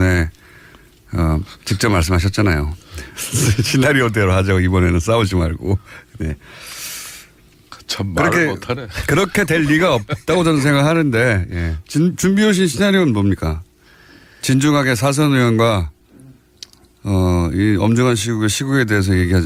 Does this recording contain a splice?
no; 0 cuts

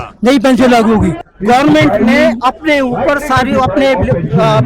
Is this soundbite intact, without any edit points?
no; 1 cut; at 1.2 s

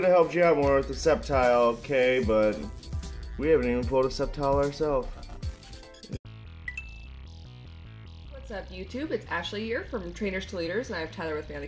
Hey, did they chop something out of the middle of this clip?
no; 0 cuts

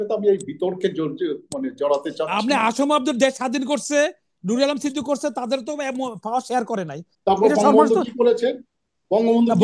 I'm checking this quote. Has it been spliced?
yes; 1 cut; at 7.0 s

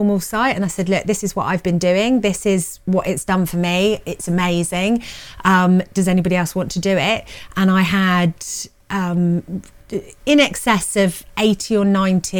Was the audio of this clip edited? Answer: no; 0 cuts

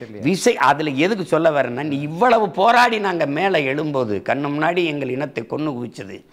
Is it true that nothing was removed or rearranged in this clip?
yes; 0 cuts

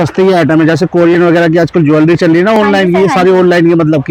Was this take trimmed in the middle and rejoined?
no; 0 cuts

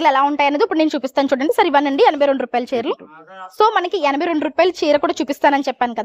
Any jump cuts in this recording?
no; 0 cuts

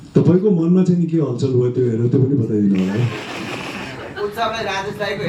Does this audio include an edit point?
no; 0 cuts

